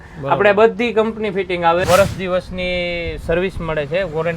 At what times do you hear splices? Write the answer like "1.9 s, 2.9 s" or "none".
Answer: 1.9 s